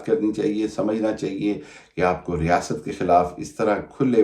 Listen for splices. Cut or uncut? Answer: uncut